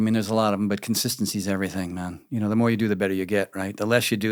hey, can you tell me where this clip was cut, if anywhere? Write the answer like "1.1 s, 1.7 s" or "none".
none